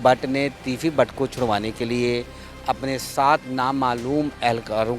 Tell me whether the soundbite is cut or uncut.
uncut